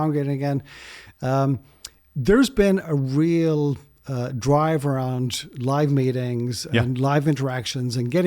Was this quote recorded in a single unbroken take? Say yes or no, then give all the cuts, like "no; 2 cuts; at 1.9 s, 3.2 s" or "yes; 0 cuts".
yes; 0 cuts